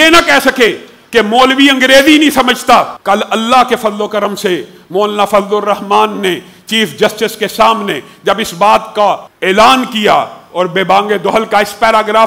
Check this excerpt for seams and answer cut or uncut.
cut